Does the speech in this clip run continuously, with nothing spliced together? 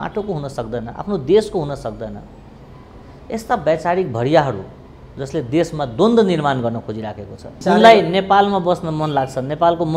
no; 1 cut; at 7.5 s

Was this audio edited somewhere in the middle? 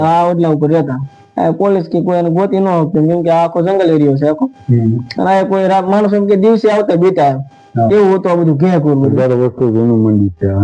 yes; 1 cut; at 9.1 s

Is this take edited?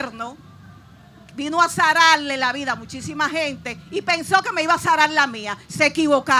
no; 0 cuts

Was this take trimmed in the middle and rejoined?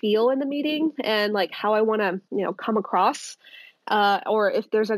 no; 0 cuts

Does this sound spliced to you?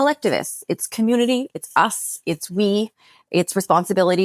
no; 0 cuts

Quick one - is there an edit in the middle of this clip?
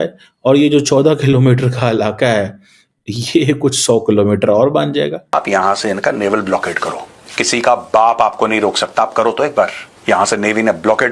yes; 2 cuts; at 5.3 s, 9.9 s

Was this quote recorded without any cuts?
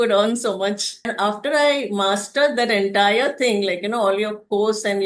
no; 1 cut; at 1.1 s

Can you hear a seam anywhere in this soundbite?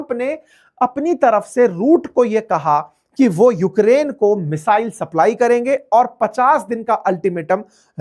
no; 0 cuts

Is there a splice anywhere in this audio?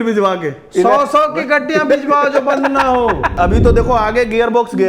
yes; 1 cut; at 3.3 s

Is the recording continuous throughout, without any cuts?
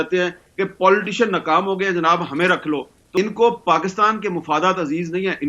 no; 1 cut; at 3.0 s

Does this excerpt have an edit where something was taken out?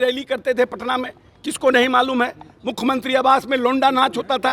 no; 0 cuts

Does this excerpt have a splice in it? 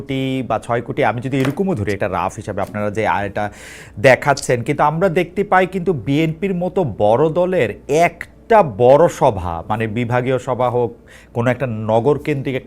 no; 0 cuts

